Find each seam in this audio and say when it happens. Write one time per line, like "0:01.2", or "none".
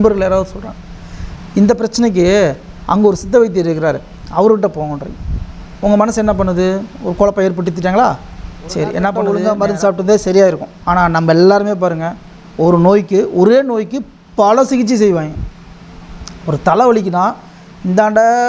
0:09.2